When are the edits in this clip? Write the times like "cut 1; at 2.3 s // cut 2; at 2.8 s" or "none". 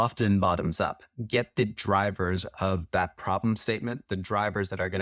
none